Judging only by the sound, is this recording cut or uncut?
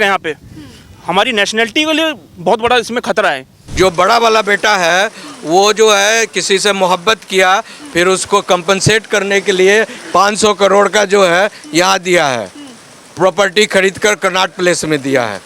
cut